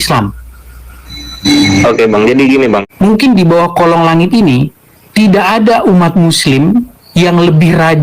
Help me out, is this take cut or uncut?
cut